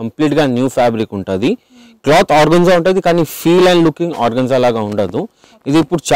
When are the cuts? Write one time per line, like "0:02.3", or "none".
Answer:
none